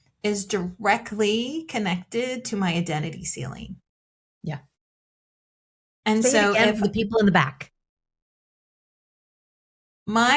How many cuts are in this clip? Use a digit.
0